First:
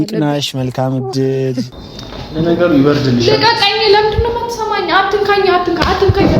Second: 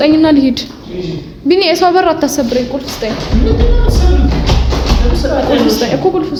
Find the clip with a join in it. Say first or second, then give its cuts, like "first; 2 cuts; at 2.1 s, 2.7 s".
first; 1 cut; at 1.7 s